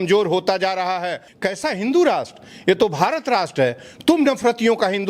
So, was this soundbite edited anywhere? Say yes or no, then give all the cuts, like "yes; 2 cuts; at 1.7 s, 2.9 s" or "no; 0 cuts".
yes; 1 cut; at 1.2 s